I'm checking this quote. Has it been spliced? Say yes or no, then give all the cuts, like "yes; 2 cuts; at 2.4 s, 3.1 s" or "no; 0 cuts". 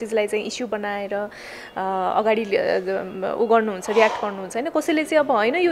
no; 0 cuts